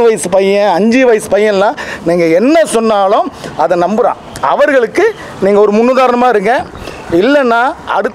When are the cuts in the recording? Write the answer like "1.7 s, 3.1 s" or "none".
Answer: none